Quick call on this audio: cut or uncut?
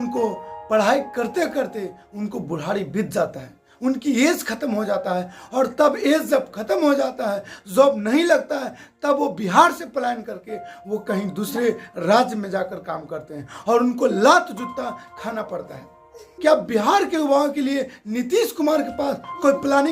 cut